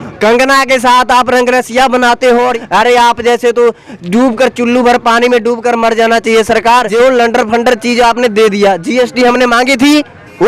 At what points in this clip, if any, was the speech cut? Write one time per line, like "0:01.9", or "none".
0:02.6
0:06.9

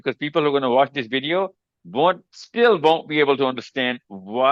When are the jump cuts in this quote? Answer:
none

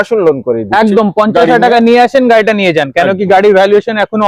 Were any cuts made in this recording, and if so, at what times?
none

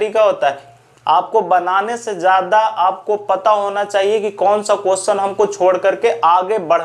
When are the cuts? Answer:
none

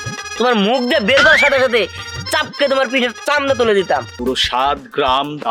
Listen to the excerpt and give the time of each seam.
0:04.1

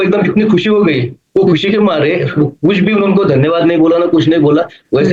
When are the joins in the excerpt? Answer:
none

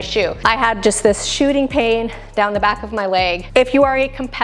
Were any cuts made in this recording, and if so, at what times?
0:03.4

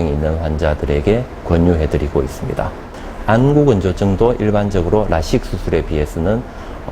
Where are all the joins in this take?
0:03.0

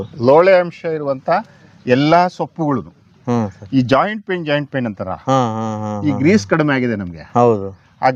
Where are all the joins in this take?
none

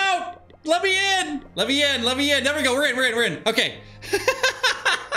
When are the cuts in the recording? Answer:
0:01.4

